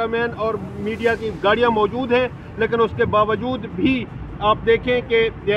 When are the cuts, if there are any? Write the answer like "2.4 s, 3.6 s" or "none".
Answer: none